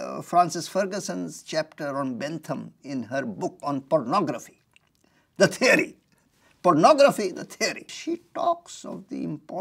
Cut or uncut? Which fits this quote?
cut